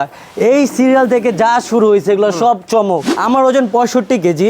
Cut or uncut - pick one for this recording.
cut